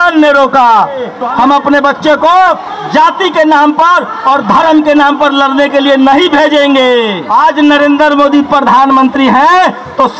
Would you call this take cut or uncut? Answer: cut